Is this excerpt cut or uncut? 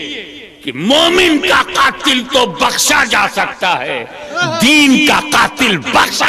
uncut